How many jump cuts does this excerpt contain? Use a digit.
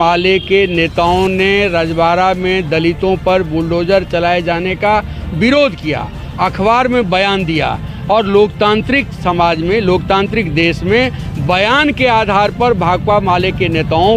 0